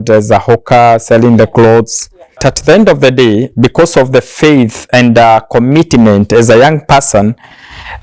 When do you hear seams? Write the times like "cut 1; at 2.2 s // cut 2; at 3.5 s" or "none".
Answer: cut 1; at 2.5 s